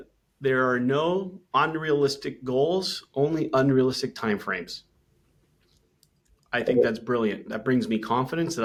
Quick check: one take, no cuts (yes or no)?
yes